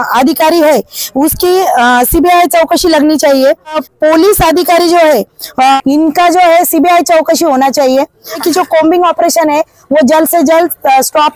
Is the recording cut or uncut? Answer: cut